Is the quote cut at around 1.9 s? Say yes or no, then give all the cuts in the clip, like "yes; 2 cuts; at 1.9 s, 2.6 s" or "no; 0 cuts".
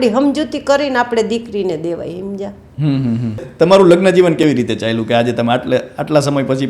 no; 1 cut; at 3.5 s